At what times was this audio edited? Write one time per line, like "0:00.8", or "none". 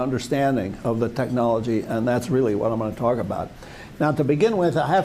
none